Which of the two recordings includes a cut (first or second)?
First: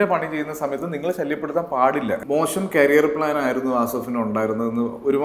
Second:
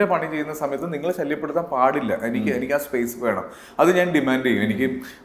first